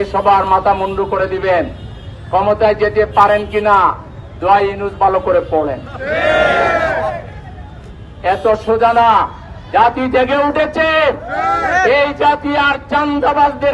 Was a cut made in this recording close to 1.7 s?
no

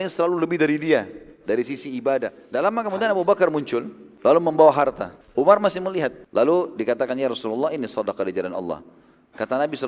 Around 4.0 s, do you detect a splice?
yes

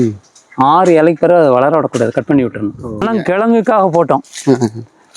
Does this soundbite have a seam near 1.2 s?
no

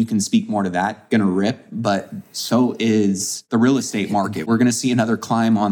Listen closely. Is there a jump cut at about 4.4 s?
yes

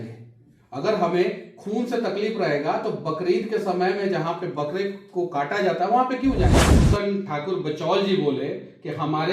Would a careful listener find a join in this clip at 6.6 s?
yes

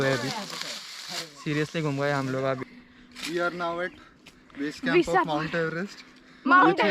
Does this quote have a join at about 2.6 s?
yes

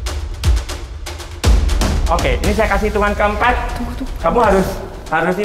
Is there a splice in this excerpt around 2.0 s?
yes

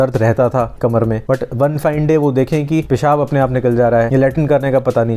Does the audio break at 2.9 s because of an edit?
yes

